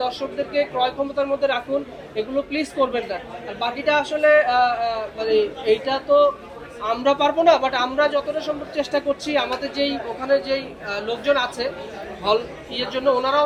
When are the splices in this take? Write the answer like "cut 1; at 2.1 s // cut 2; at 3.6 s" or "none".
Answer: none